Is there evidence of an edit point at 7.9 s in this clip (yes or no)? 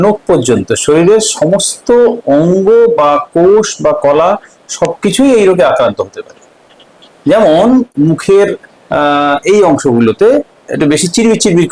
yes